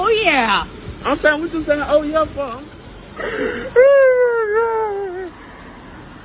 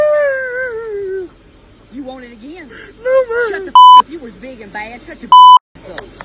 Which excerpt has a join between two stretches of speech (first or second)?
first